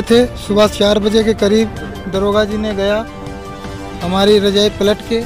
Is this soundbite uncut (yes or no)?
yes